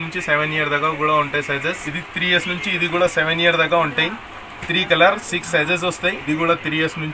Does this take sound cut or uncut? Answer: cut